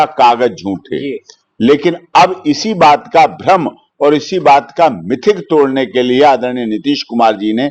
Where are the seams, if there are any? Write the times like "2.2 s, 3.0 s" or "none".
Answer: none